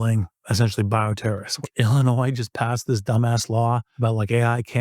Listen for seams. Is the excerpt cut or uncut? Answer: cut